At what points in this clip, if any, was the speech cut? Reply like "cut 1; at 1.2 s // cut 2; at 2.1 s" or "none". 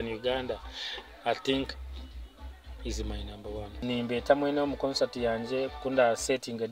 cut 1; at 3.8 s

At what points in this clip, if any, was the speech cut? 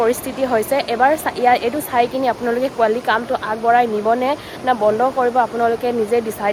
none

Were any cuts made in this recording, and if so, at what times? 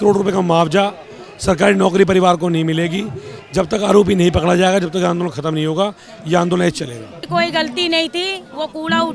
cut 1; at 7.1 s

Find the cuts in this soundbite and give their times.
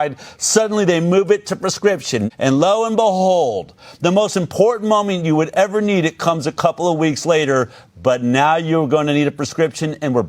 cut 1; at 2.3 s

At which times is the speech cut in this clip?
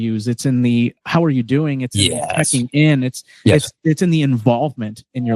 none

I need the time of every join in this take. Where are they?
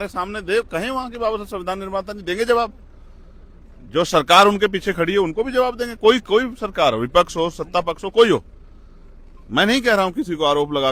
none

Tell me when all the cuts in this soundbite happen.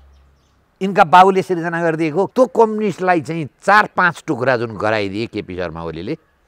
cut 1; at 2.3 s

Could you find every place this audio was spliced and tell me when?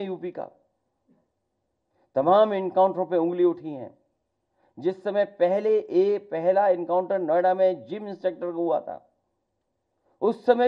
none

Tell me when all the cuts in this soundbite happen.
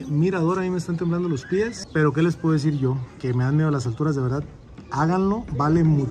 none

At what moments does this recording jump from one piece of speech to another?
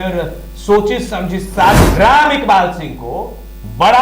cut 1; at 1.9 s

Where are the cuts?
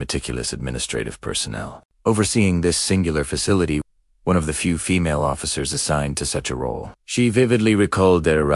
cut 1; at 3.8 s

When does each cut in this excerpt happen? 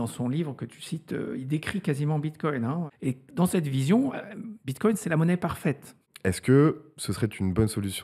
cut 1; at 2.9 s // cut 2; at 6.1 s

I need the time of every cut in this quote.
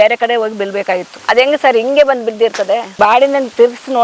cut 1; at 2.9 s

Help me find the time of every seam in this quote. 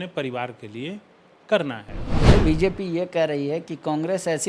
cut 1; at 2.3 s

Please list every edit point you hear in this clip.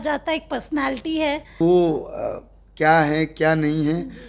cut 1; at 1.5 s

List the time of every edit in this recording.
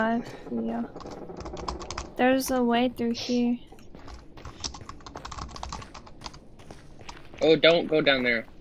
cut 1; at 7.1 s

